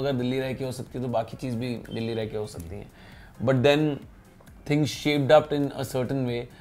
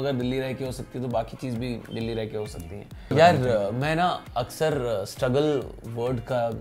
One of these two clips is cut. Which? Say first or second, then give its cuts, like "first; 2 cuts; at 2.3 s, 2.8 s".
second; 1 cut; at 2.9 s